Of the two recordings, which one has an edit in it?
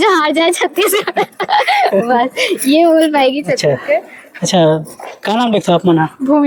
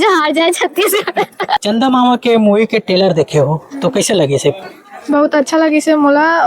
second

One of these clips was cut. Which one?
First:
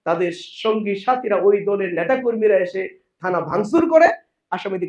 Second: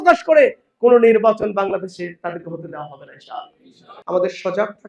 second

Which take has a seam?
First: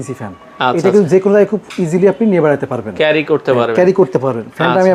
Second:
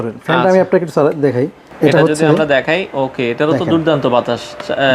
second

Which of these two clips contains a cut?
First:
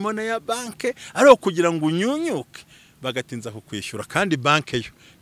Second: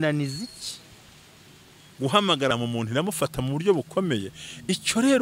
second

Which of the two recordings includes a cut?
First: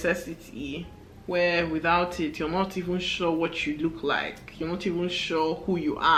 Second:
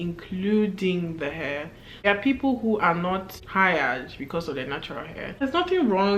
second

